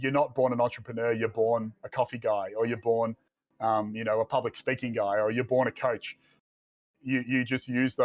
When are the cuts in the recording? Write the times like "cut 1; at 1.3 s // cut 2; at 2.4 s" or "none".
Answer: none